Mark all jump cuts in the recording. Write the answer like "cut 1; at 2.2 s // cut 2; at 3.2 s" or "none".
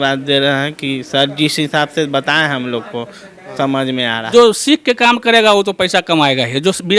cut 1; at 4.3 s

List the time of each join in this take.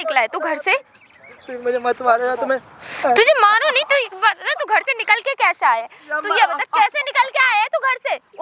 none

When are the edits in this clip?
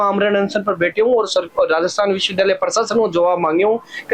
none

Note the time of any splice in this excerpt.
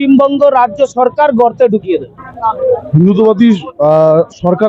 cut 1; at 2.6 s

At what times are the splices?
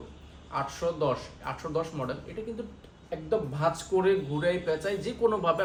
none

